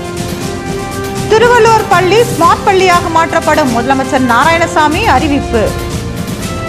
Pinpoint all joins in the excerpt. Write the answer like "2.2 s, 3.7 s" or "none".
5.7 s

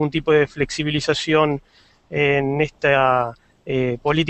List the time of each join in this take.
2.1 s

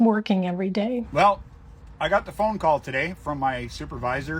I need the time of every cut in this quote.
1.1 s

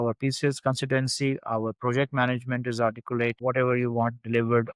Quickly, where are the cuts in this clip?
3.4 s

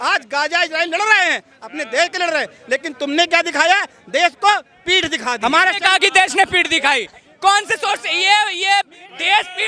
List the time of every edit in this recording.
5.4 s

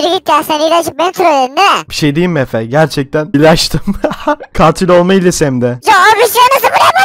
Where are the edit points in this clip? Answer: 3.3 s

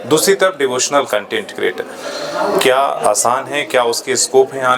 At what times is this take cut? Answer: none

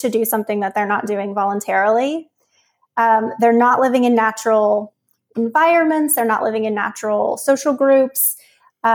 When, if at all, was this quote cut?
none

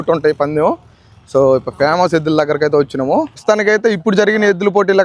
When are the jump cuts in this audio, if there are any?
3.4 s

